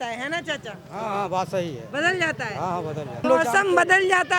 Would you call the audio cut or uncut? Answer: cut